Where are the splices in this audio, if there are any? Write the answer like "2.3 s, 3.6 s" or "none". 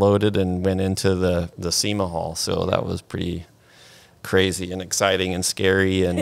1.5 s